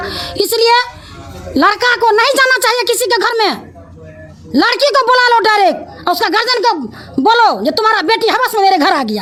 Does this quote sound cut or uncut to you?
uncut